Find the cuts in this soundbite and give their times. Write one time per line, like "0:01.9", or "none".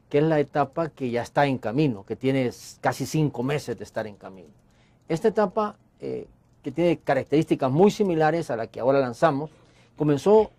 none